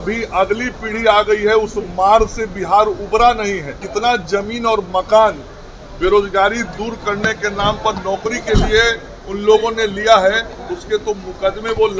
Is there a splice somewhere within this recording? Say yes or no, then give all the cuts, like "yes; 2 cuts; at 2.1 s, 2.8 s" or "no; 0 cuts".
yes; 1 cut; at 3.8 s